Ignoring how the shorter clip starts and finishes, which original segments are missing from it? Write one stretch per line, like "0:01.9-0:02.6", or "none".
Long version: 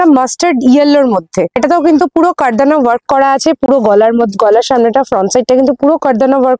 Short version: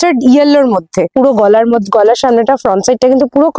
0:01.5-0:03.6